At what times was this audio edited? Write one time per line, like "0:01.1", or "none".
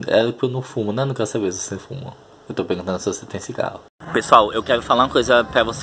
0:03.9